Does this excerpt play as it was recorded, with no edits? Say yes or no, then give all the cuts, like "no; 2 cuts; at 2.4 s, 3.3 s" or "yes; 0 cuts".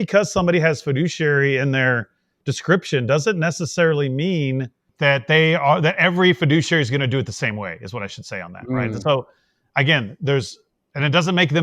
yes; 0 cuts